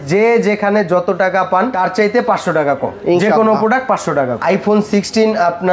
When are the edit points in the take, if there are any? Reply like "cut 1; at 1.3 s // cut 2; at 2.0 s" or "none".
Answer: cut 1; at 4.4 s